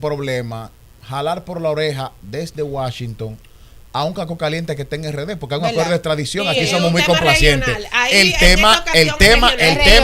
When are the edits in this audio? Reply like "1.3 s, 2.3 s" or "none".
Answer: none